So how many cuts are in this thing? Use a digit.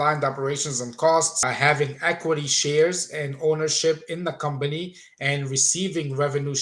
1